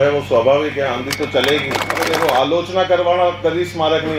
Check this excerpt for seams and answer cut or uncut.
cut